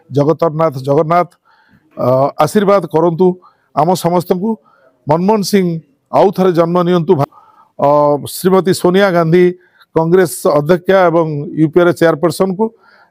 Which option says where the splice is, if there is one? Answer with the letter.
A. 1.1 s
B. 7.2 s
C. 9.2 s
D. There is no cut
B